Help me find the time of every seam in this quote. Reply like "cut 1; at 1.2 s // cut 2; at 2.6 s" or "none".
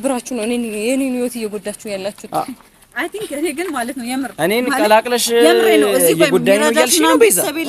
none